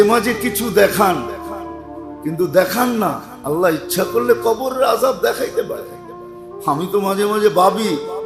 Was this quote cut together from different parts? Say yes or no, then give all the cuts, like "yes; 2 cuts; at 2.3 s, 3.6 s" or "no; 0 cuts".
no; 0 cuts